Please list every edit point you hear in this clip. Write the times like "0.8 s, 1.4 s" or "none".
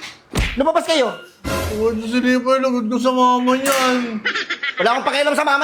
none